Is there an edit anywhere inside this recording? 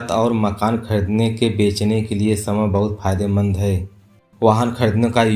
no; 0 cuts

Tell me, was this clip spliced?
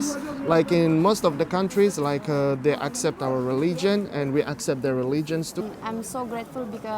yes; 1 cut; at 5.6 s

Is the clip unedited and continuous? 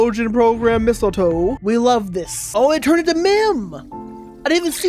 no; 1 cut; at 2.4 s

